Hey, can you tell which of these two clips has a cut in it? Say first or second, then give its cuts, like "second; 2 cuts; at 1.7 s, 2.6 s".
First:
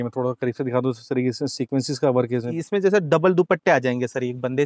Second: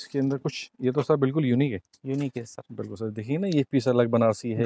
first; 1 cut; at 2.5 s